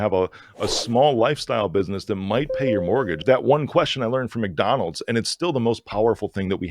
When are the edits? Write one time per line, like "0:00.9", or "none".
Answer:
0:03.2